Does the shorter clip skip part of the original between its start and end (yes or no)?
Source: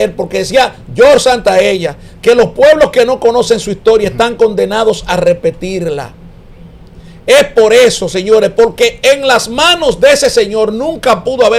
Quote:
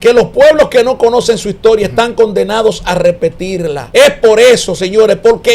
yes